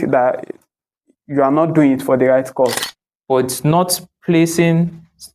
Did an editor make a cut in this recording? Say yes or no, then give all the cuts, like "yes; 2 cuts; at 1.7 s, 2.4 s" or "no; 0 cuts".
yes; 1 cut; at 2.8 s